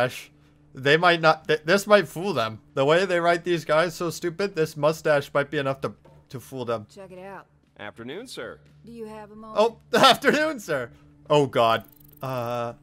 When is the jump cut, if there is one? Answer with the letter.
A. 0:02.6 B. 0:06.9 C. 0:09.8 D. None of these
D